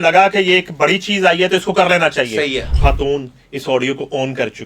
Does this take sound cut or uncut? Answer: cut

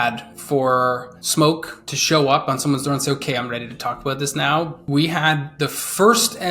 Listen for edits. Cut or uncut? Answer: cut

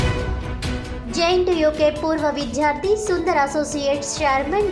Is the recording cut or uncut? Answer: cut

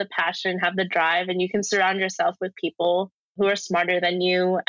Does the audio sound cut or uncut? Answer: cut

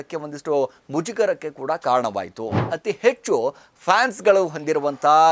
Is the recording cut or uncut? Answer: cut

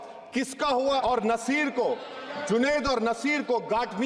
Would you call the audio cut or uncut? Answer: cut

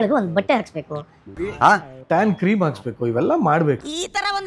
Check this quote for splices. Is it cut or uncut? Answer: cut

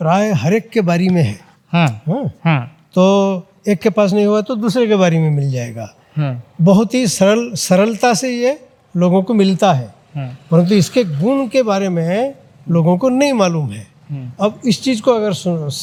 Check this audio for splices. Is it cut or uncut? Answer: uncut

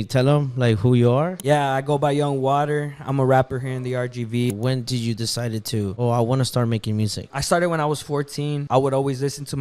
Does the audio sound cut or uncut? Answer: cut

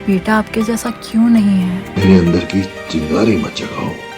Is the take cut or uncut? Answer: cut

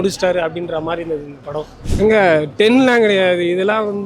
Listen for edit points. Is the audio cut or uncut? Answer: cut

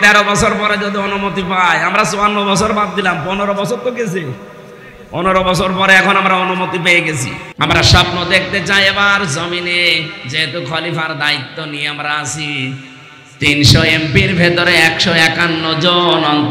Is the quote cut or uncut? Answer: cut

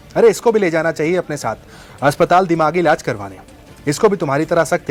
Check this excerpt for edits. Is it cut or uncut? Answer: uncut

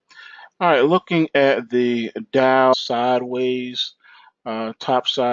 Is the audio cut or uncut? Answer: uncut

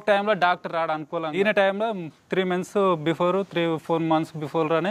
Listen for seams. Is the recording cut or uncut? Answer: cut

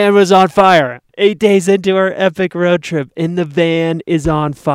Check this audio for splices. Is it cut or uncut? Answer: cut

